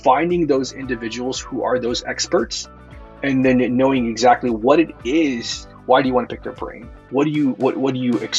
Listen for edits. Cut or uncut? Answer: uncut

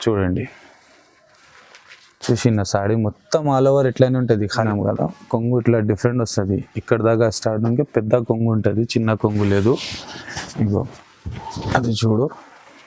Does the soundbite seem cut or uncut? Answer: cut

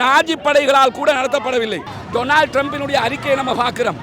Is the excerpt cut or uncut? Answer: cut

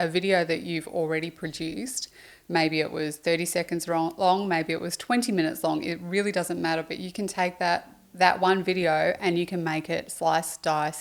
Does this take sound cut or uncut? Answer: uncut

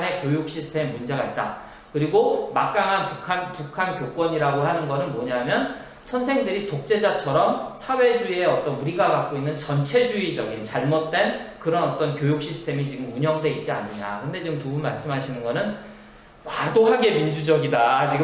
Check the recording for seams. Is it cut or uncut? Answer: uncut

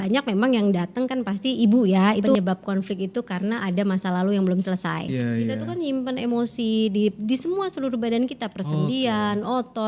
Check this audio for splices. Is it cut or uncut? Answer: cut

